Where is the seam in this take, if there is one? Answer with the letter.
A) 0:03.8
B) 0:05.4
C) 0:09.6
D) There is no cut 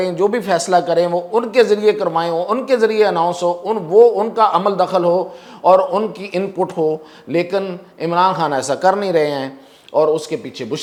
D